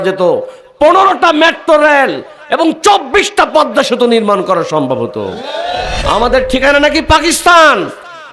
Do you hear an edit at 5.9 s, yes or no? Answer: yes